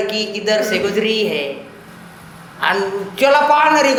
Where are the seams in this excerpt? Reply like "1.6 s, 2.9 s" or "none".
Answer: none